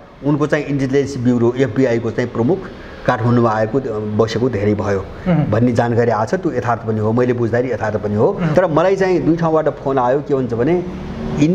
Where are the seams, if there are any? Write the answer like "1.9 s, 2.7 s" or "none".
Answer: 8.5 s

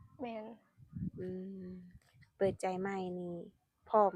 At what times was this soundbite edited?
none

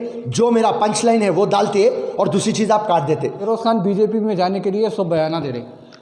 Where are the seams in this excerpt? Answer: 3.4 s

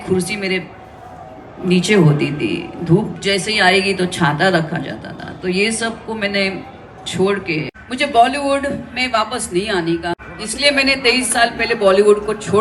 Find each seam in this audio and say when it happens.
7.8 s, 10.3 s

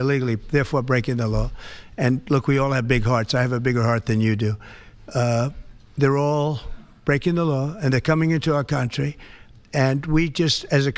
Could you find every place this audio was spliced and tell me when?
none

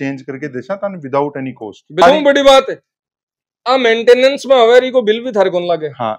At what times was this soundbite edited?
2.0 s

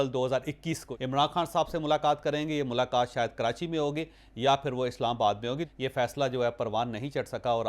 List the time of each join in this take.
0.9 s, 5.6 s

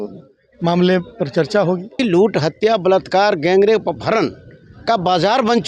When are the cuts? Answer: 1.9 s

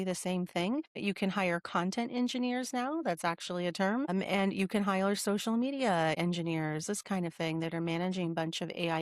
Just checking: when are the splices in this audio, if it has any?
1.0 s, 4.1 s, 6.2 s

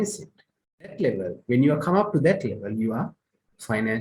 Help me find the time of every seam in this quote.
0.9 s

